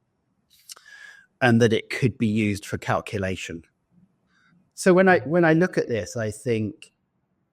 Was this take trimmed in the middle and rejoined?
yes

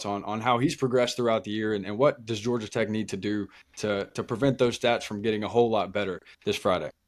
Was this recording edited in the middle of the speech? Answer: no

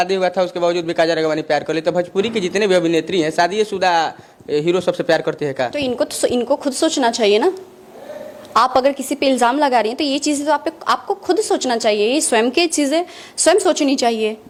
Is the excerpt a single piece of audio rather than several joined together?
yes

